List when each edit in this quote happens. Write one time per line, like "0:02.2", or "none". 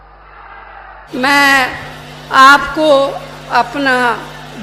0:01.1